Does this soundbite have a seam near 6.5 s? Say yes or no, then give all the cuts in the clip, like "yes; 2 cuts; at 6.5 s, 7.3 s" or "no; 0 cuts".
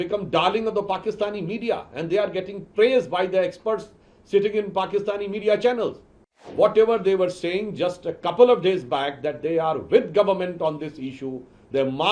yes; 1 cut; at 6.5 s